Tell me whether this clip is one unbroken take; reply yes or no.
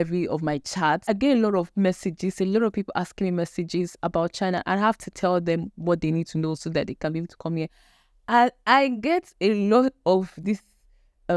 no